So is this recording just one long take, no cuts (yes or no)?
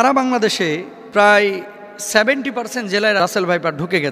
no